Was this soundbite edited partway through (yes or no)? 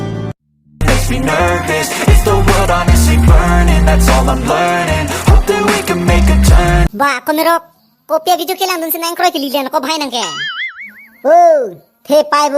yes